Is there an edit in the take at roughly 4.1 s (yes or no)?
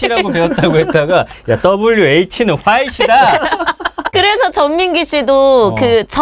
yes